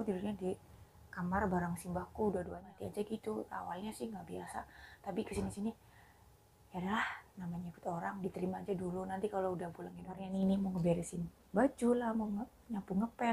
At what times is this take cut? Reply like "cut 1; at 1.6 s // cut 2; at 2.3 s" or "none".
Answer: cut 1; at 2.6 s // cut 2; at 10.3 s